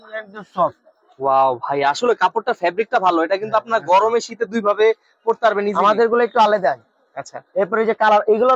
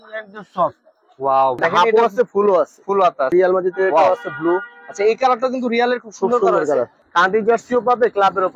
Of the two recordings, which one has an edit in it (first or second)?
second